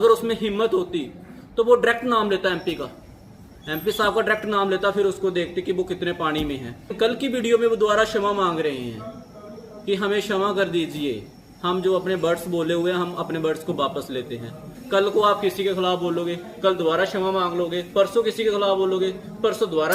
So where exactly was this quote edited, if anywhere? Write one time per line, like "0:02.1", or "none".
0:06.9
0:14.7